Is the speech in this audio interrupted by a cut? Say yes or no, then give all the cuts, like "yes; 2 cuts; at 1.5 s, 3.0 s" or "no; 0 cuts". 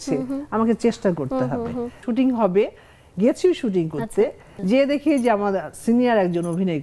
yes; 2 cuts; at 2.0 s, 4.5 s